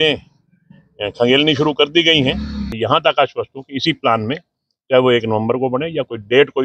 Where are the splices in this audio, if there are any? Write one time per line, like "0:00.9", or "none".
0:02.7